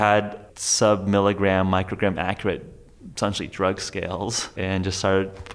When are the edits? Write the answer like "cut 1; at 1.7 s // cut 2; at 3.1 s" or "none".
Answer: cut 1; at 4.6 s